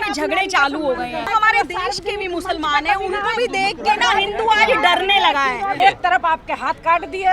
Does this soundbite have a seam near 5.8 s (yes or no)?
yes